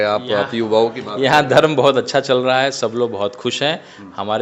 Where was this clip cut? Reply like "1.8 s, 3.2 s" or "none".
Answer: none